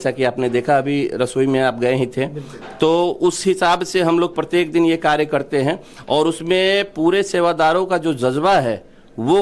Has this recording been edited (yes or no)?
no